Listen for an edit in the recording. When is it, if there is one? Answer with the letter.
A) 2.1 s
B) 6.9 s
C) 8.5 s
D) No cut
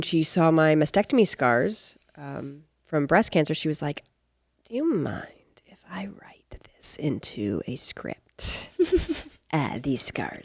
D